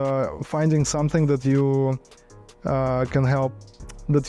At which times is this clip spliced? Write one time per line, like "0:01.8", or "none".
none

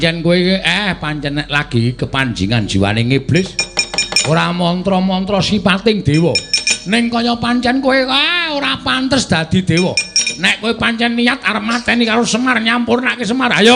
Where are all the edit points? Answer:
none

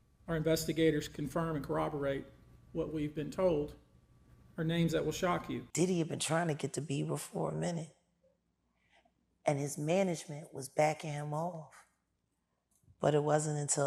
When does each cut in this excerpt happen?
0:05.7

